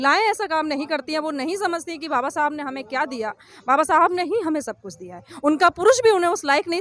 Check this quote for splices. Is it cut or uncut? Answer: uncut